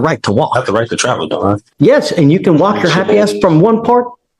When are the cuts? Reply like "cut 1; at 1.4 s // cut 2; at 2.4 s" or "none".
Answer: cut 1; at 1.7 s